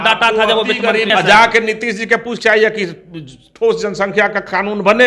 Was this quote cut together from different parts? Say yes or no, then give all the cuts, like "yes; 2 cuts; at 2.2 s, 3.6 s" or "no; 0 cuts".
yes; 1 cut; at 1.1 s